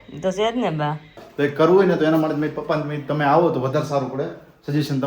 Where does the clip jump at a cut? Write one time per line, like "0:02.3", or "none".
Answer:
0:01.2